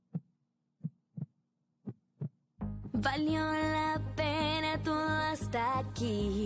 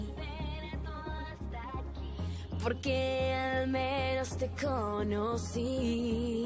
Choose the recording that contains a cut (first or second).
first